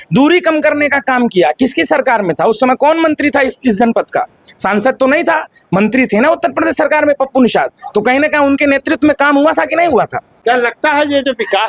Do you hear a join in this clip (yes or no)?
no